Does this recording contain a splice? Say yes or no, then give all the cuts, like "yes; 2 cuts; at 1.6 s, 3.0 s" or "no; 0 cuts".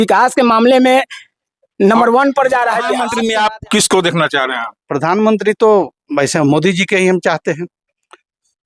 yes; 1 cut; at 3.0 s